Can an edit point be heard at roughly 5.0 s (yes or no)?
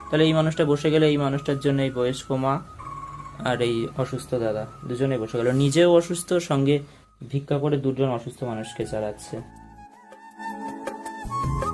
no